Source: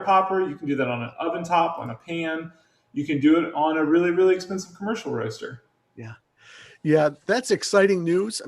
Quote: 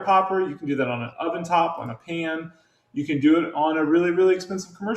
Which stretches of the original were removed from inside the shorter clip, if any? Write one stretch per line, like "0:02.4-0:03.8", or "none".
none